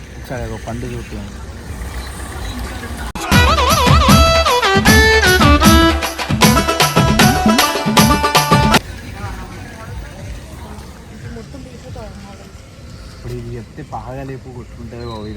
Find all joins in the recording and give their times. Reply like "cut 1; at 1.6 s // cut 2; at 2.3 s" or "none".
none